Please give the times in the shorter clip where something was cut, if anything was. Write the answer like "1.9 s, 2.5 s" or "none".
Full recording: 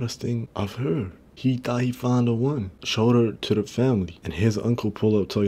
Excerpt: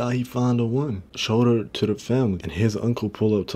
2.4 s